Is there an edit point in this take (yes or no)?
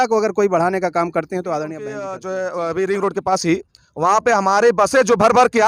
yes